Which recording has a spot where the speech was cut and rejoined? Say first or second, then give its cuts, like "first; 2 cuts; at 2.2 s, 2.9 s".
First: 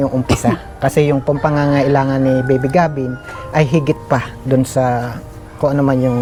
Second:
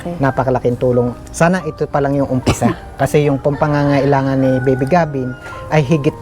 second; 1 cut; at 1.2 s